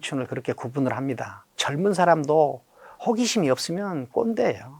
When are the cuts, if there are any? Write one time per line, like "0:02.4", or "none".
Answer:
0:01.6